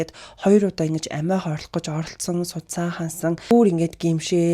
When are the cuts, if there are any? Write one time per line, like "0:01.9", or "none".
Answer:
0:03.5